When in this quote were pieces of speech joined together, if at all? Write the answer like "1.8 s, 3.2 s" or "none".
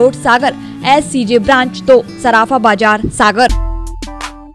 3.5 s